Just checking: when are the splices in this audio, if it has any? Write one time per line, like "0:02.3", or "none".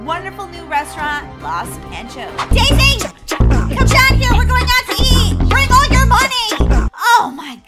0:02.5